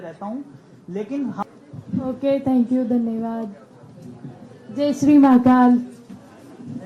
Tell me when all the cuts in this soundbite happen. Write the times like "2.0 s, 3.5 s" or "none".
1.4 s

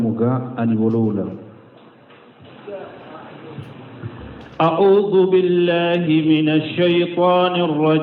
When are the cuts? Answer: none

